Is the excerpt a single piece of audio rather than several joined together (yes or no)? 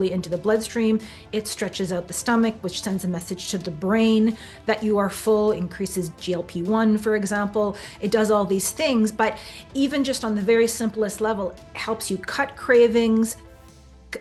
yes